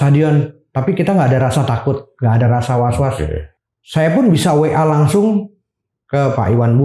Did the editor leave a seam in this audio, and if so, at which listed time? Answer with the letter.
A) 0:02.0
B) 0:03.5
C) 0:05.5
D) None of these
B